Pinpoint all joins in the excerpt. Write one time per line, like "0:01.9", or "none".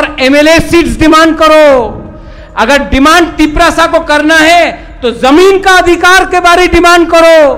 none